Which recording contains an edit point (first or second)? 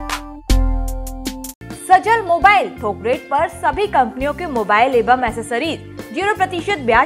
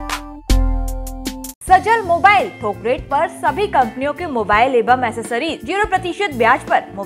second